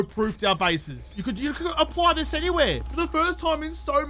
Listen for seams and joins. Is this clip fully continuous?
no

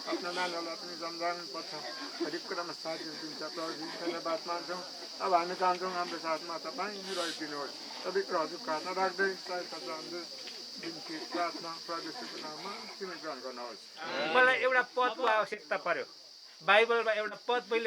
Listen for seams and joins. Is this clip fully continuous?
no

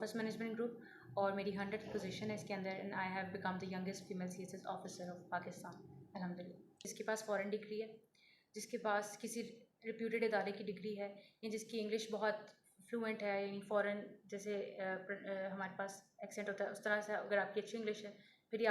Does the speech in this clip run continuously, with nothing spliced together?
no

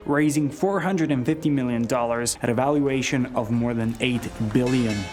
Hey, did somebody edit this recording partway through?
no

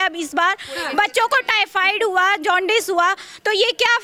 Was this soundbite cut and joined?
no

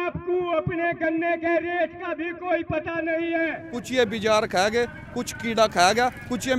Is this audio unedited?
no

